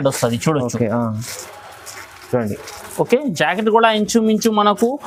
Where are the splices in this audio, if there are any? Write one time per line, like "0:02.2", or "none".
none